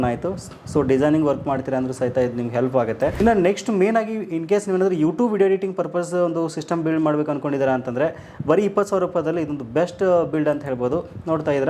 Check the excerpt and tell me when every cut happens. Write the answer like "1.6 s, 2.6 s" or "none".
3.1 s